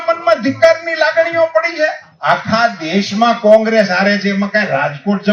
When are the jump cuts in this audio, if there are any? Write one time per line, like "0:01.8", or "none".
0:02.1